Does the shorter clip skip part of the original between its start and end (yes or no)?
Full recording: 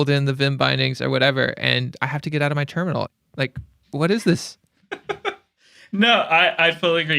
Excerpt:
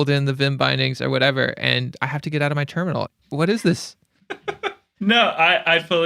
yes